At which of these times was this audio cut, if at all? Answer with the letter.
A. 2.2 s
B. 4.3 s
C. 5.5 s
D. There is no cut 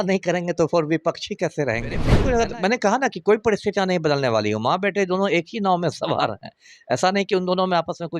A